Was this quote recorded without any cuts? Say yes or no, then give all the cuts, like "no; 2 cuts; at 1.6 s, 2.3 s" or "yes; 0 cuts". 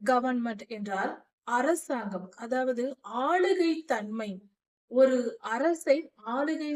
yes; 0 cuts